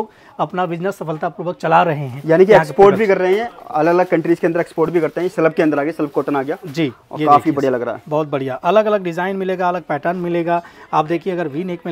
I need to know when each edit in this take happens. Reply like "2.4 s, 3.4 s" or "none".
none